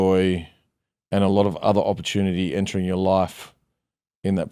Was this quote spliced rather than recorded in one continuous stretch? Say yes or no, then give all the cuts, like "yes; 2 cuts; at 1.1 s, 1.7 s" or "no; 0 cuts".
no; 0 cuts